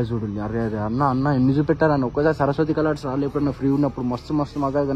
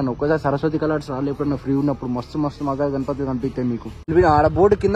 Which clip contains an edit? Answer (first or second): second